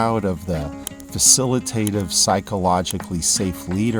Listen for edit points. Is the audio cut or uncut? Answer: uncut